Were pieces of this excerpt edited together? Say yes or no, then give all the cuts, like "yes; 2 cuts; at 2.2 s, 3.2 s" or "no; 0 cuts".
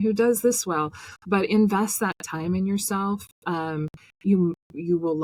no; 0 cuts